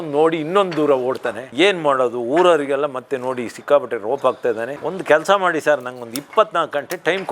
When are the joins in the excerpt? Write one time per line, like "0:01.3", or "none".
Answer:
0:04.8